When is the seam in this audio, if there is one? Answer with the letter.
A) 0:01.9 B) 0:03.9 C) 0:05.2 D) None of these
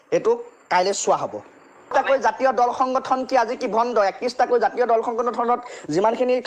A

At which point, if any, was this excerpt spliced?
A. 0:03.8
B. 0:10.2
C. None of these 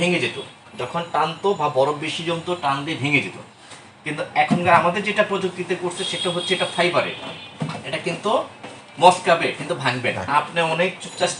B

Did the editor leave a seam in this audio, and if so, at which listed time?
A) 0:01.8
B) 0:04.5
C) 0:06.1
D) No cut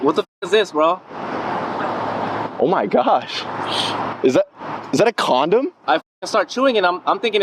D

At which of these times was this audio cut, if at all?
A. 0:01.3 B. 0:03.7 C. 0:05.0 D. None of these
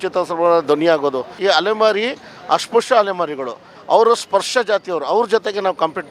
A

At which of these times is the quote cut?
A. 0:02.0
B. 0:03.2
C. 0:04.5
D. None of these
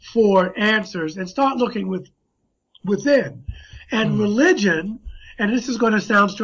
C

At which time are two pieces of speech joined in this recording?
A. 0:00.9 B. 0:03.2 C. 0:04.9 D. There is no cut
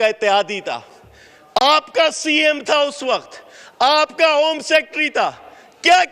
D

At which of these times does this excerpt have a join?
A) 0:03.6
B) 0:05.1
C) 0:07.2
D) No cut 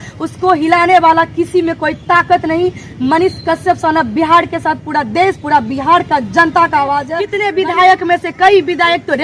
C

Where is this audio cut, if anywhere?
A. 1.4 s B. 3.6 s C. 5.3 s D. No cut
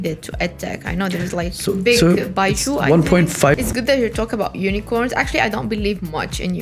B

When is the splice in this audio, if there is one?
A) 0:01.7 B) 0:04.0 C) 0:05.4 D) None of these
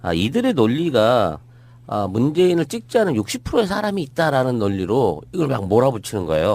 B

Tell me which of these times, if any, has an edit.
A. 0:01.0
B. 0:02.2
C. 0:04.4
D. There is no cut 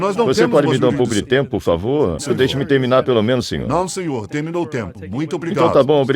B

